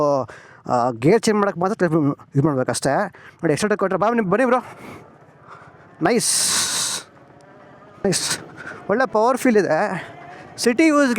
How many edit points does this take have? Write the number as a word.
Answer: one